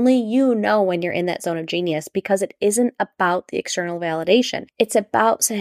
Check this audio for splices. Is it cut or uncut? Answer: cut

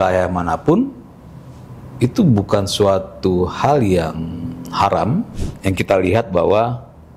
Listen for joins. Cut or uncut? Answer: cut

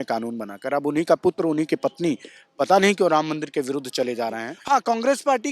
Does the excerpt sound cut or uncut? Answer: cut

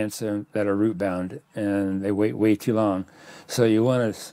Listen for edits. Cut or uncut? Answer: uncut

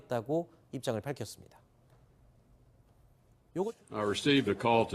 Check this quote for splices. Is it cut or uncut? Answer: cut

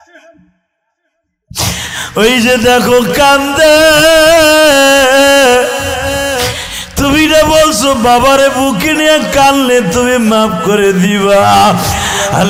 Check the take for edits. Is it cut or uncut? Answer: uncut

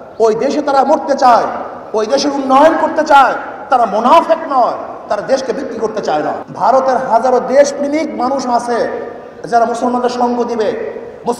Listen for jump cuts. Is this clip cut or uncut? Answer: cut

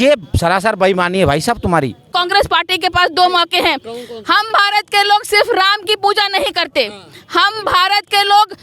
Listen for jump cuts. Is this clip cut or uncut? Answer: cut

